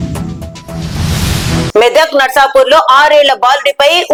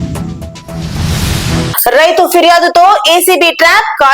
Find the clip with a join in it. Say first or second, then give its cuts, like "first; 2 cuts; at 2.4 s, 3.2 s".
second; 1 cut; at 1.7 s